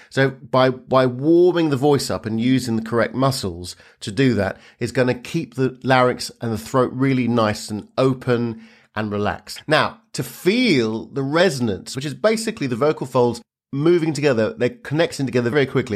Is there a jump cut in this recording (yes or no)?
yes